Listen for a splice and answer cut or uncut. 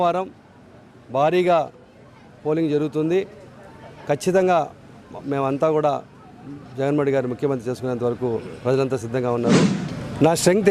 cut